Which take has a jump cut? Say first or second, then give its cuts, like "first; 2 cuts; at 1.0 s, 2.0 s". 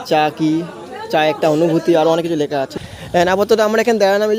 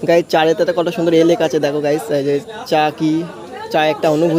first; 1 cut; at 2.8 s